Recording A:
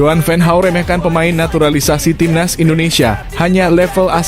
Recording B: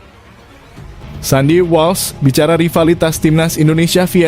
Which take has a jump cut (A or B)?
B